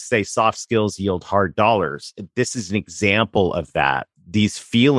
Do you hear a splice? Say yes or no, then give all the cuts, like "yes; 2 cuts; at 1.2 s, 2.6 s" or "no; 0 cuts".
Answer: yes; 1 cut; at 4.1 s